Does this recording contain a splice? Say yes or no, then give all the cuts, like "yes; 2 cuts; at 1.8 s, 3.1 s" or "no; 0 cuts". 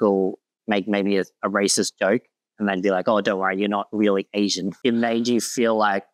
no; 0 cuts